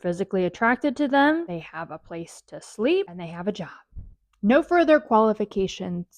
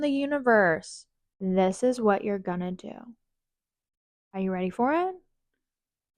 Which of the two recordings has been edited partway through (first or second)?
first